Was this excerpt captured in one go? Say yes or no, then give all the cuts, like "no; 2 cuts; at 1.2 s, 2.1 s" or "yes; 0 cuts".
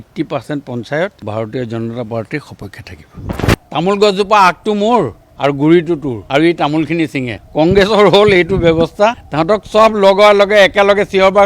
no; 4 cuts; at 1.2 s, 3.2 s, 6.1 s, 9.3 s